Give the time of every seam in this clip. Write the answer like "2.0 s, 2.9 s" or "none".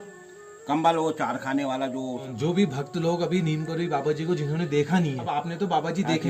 2.3 s, 5.2 s